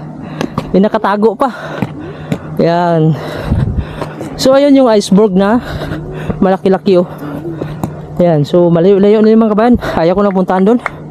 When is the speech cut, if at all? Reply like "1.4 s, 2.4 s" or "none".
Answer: none